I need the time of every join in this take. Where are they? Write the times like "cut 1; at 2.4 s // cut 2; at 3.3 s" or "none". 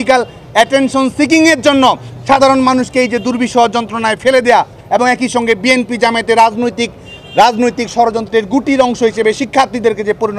none